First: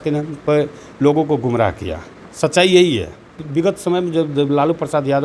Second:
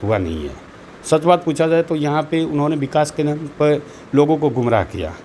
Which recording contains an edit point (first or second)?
first